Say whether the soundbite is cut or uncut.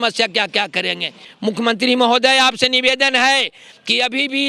cut